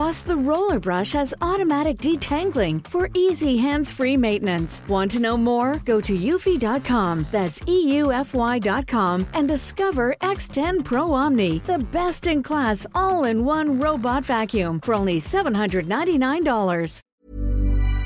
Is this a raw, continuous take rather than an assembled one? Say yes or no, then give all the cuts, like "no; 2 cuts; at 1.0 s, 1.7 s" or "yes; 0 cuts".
no; 1 cut; at 17.0 s